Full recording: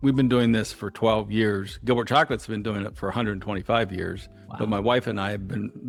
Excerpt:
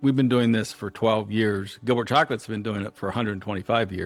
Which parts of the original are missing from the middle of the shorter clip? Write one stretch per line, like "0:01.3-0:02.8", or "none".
none